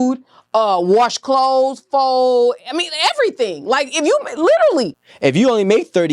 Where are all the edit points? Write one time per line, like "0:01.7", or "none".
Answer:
0:05.0